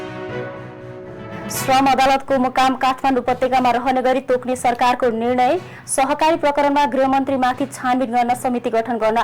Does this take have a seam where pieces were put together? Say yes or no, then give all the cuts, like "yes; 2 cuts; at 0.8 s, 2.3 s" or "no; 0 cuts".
yes; 1 cut; at 1.3 s